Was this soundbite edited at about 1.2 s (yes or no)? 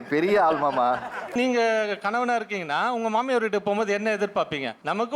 yes